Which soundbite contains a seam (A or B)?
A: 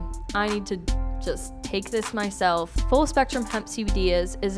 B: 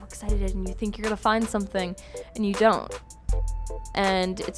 A